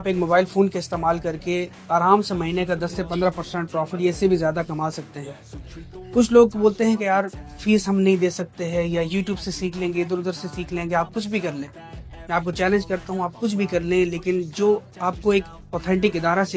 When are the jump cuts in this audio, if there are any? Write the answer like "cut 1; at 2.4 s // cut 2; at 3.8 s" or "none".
none